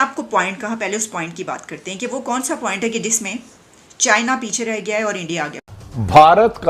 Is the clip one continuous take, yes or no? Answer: no